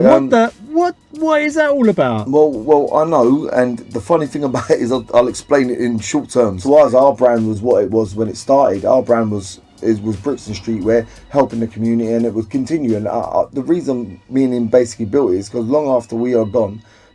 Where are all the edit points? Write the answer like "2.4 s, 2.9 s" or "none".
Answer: 6.6 s